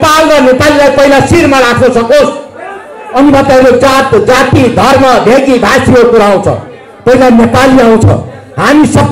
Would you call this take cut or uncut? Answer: uncut